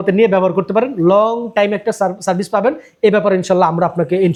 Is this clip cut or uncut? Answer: uncut